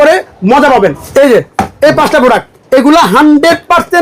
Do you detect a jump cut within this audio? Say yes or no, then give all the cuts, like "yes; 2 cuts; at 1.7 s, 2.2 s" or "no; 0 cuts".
yes; 2 cuts; at 1.0 s, 2.5 s